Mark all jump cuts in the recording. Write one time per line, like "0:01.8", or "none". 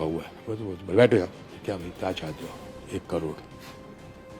0:01.5